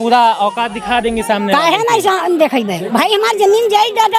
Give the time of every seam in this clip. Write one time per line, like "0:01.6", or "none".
none